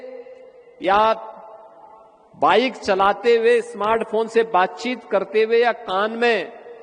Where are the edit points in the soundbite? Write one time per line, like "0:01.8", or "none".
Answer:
none